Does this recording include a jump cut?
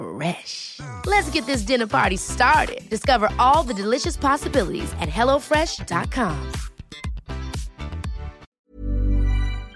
yes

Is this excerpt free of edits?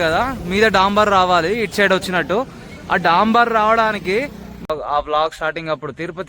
no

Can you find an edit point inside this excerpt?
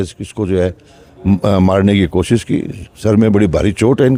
no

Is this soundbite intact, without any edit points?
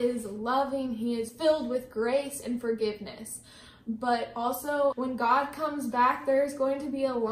no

